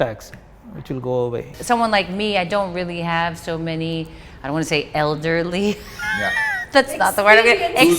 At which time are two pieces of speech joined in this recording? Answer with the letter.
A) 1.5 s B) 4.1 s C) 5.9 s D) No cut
A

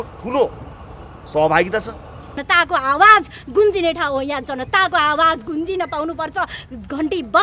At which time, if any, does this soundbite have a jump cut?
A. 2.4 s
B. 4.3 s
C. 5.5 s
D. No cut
A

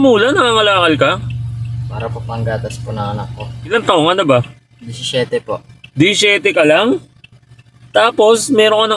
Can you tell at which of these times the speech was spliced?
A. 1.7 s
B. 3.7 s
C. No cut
B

